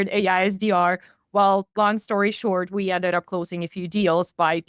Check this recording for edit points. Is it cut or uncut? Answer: uncut